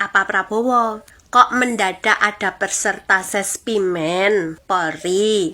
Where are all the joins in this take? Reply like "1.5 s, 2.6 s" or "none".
1.1 s, 4.6 s